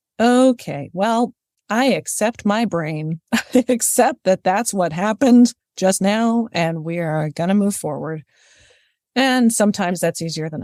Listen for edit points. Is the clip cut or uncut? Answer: uncut